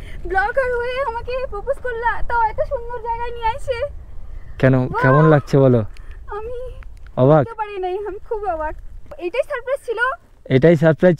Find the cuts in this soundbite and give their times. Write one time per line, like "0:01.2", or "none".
0:09.1